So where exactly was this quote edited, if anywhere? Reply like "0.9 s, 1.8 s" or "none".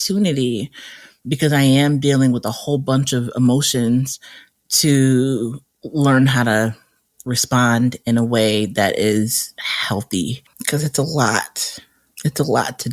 10.3 s